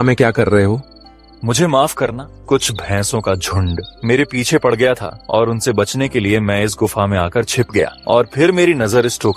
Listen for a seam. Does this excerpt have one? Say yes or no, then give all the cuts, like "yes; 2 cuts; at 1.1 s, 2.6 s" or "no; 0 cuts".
yes; 4 cuts; at 2.3 s, 3.9 s, 5.1 s, 8.0 s